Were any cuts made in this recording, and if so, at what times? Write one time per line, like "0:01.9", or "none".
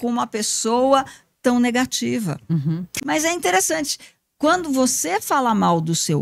0:02.9